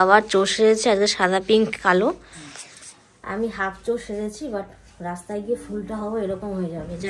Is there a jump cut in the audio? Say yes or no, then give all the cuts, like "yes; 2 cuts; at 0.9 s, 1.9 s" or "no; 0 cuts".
no; 0 cuts